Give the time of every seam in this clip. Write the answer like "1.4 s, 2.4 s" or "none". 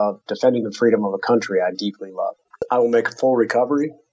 2.5 s